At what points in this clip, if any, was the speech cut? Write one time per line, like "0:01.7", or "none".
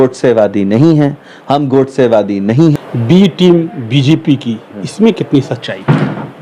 0:02.8